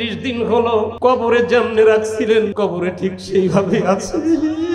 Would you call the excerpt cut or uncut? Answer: cut